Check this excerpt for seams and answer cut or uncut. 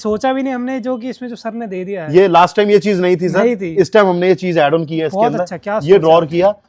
uncut